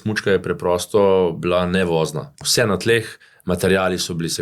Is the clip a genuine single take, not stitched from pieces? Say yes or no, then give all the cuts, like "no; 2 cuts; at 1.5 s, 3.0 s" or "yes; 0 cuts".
no; 1 cut; at 2.4 s